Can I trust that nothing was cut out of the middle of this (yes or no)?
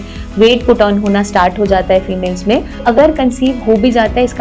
no